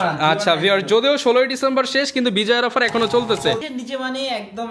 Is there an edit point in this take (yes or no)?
yes